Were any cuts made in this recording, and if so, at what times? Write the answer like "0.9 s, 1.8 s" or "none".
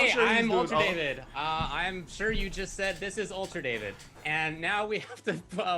1.0 s